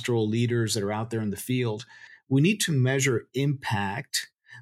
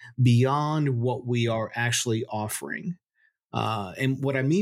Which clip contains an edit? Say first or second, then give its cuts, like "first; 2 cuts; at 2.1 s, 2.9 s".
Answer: first; 1 cut; at 2.1 s